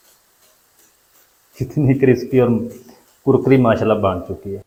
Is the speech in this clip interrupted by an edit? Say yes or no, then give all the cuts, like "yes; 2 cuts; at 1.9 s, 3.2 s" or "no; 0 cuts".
no; 0 cuts